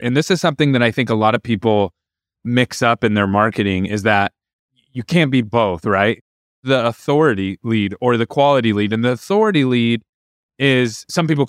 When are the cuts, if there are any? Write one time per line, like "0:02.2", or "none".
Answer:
0:06.6

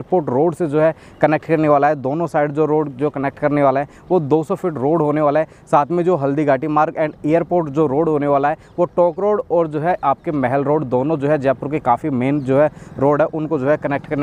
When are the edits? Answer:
none

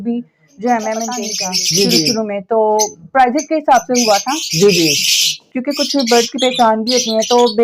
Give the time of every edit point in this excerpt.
0:01.3

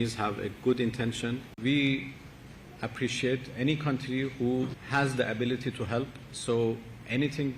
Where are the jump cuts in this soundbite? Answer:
0:01.6
0:04.8
0:06.3

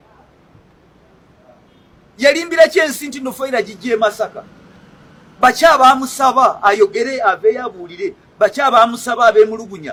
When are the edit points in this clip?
none

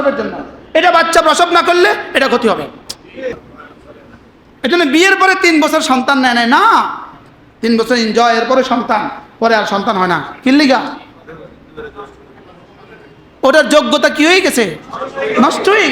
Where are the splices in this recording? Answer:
0:03.4

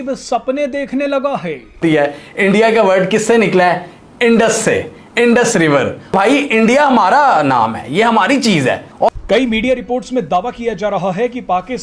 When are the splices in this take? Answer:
0:01.8
0:06.1
0:09.1

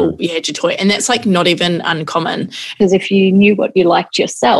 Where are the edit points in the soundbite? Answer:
0:02.8

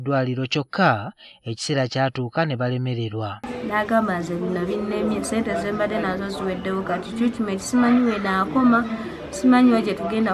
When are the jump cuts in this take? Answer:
0:03.4

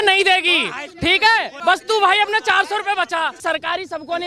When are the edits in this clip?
0:01.5
0:03.4

